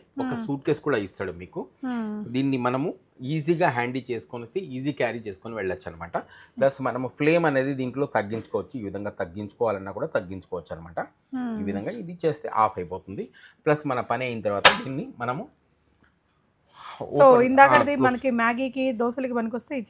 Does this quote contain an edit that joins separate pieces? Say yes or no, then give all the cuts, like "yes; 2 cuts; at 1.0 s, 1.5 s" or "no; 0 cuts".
no; 0 cuts